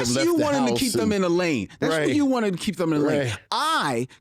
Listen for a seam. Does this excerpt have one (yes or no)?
no